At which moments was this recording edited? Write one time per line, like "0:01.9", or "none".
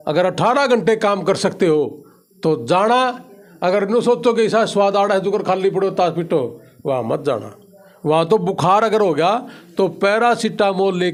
none